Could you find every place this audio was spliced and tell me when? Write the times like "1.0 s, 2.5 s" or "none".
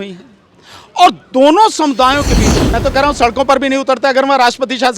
2.7 s